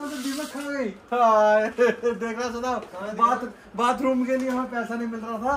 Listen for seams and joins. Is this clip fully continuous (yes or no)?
yes